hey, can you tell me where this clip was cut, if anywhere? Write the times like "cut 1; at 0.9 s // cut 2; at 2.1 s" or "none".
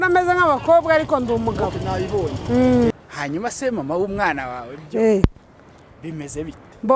cut 1; at 3.1 s